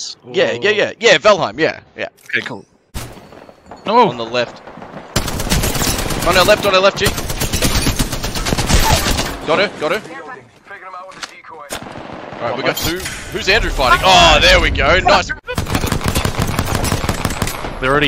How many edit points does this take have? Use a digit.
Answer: 2